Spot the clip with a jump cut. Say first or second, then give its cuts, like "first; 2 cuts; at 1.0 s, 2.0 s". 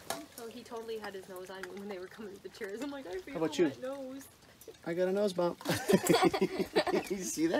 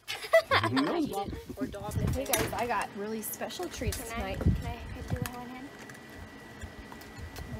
second; 1 cut; at 1.9 s